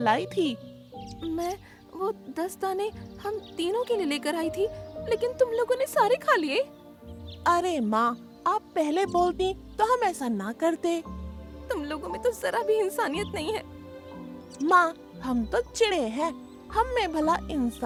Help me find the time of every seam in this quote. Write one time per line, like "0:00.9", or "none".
none